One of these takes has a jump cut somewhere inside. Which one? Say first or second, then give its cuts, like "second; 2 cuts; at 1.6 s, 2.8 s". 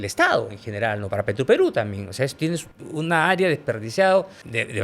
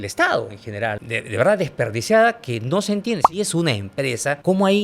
second; 2 cuts; at 1.0 s, 3.3 s